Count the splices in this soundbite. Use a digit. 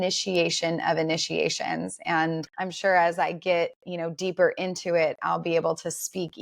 1